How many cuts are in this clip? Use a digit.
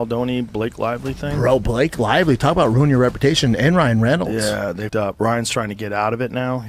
0